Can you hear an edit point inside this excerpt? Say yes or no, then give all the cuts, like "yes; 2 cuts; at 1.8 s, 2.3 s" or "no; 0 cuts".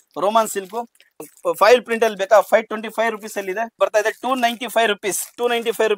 yes; 2 cuts; at 1.2 s, 3.8 s